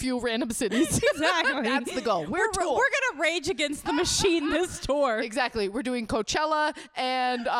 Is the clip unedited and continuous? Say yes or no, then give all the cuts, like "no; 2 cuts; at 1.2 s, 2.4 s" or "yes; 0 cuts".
yes; 0 cuts